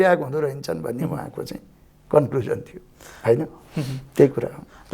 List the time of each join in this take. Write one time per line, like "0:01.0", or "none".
none